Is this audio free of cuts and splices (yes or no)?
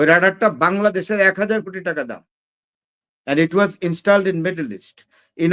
yes